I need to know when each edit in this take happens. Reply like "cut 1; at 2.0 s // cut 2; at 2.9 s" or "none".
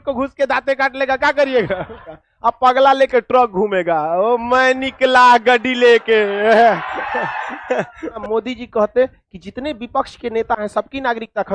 cut 1; at 2.0 s // cut 2; at 6.3 s // cut 3; at 8.2 s